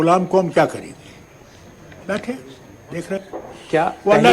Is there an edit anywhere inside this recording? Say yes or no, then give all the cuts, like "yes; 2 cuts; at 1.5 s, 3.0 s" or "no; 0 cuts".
yes; 1 cut; at 3.2 s